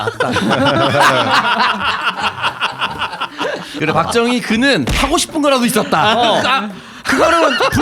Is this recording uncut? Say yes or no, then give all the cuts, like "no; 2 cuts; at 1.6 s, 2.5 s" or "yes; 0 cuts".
no; 1 cut; at 3.8 s